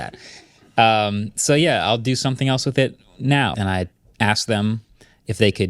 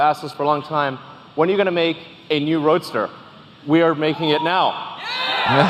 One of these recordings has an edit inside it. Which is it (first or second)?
first